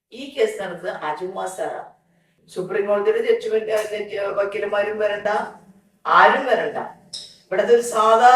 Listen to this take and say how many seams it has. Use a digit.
1